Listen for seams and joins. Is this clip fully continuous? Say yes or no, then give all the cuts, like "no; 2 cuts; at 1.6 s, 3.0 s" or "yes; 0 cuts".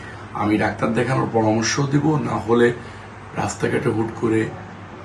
yes; 0 cuts